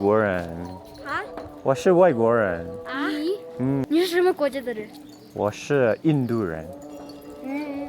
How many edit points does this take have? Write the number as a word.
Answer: one